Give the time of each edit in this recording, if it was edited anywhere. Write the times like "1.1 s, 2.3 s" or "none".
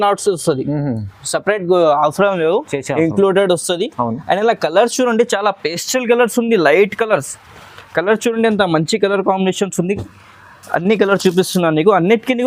none

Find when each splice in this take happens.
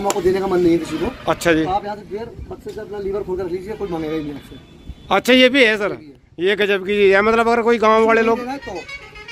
none

